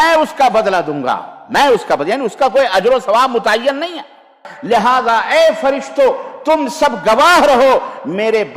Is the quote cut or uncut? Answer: cut